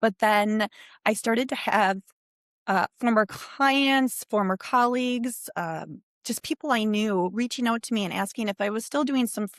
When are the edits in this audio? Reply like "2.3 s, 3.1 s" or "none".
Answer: none